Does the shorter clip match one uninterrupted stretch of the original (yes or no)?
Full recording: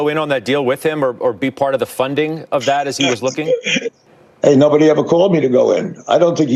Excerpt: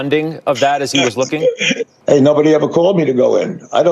no